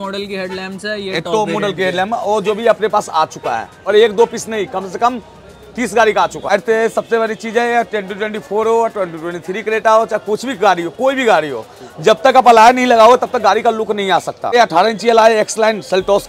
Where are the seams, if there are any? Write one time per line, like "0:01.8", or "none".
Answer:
0:03.7
0:06.5
0:14.5